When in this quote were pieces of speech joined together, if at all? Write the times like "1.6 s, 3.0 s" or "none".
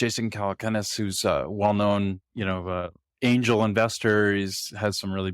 3.1 s